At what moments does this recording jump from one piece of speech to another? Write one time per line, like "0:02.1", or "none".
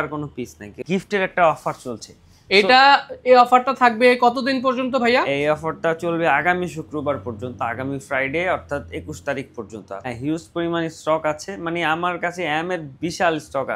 0:00.8
0:10.1